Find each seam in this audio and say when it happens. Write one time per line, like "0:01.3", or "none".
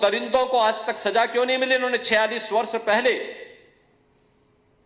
0:02.4